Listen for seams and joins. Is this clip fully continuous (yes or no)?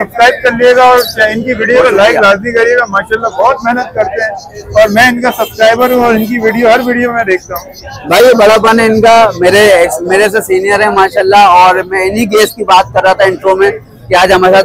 yes